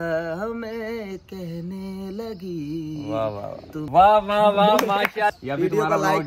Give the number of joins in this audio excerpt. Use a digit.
2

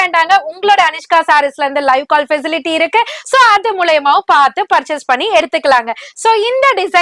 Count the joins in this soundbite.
0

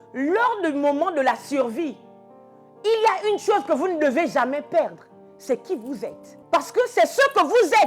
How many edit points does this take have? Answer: 1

